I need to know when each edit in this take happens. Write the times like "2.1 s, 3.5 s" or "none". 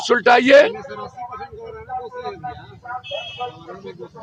none